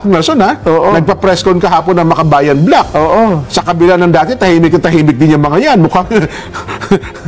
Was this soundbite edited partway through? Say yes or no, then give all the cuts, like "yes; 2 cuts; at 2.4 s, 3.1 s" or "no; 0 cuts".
no; 0 cuts